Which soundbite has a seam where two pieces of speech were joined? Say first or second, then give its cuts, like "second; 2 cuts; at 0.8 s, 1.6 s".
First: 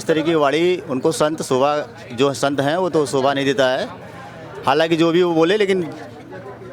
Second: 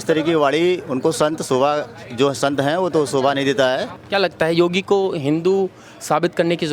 second; 1 cut; at 4.0 s